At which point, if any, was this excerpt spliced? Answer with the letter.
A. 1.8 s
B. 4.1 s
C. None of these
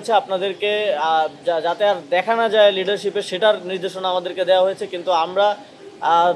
C